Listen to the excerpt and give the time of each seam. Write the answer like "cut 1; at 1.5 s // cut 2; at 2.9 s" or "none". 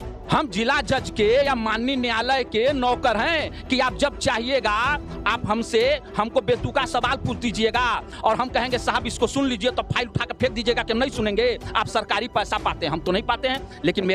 none